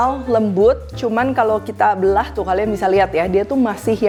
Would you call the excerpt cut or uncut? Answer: uncut